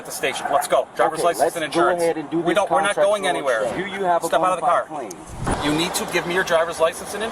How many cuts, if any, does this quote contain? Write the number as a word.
two